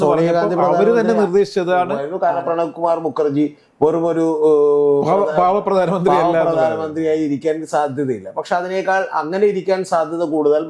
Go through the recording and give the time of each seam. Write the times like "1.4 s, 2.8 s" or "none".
2.0 s